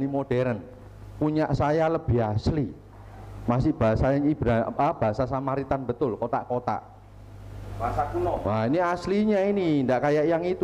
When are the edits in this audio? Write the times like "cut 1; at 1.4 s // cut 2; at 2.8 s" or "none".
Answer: none